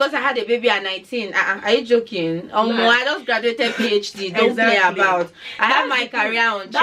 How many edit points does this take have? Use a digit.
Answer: 0